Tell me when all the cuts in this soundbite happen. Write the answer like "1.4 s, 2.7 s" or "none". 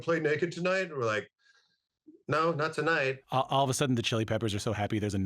3.3 s